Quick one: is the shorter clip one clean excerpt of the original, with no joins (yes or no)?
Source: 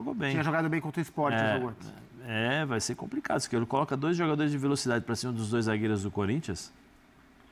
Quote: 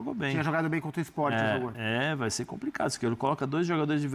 no